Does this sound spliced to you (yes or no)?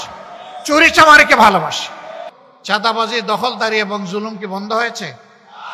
yes